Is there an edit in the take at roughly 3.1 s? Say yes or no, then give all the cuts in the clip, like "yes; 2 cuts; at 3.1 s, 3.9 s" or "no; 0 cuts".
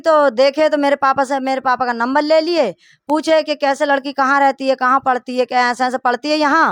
no; 0 cuts